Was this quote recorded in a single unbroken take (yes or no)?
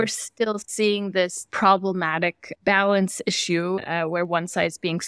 no